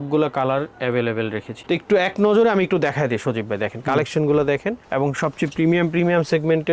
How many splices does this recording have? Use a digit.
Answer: 1